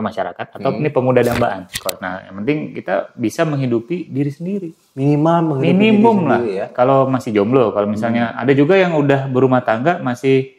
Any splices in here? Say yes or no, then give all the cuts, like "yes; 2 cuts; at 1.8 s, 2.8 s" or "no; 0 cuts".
yes; 1 cut; at 1.7 s